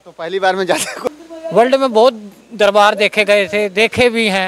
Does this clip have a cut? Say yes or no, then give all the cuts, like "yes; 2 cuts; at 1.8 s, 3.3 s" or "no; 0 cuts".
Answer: yes; 1 cut; at 1.1 s